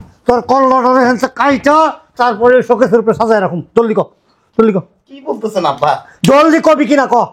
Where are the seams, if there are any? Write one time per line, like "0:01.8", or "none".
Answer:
none